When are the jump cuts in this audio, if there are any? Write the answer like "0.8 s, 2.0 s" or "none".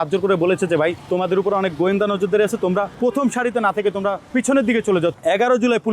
1.0 s, 2.9 s, 4.2 s, 5.2 s

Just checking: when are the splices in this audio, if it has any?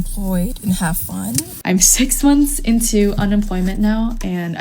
1.5 s

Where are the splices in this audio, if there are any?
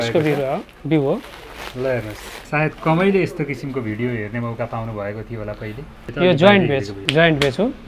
2.3 s, 6.0 s, 7.0 s

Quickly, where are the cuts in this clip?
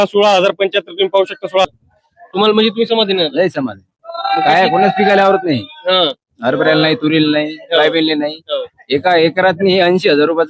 1.7 s

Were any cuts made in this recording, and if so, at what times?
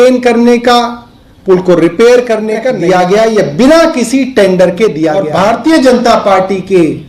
2.7 s, 5.2 s

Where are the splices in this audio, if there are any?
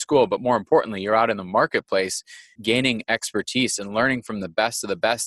2.6 s

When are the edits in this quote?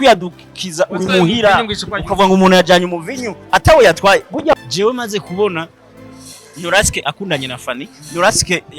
4.5 s

